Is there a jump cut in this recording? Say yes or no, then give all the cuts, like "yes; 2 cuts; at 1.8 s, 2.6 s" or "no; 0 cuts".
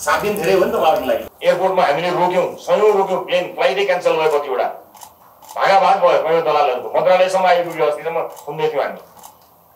yes; 1 cut; at 1.3 s